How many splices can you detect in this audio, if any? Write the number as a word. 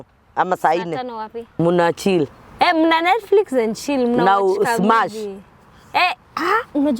one